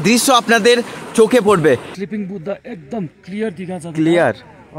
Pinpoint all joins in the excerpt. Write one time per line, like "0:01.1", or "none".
0:02.0